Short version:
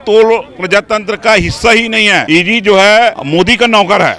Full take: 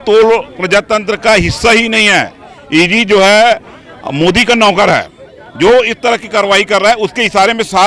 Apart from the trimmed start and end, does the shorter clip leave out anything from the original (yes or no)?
yes